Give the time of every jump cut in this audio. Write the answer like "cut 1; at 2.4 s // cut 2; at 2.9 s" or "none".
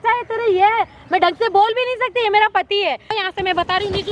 cut 1; at 3.2 s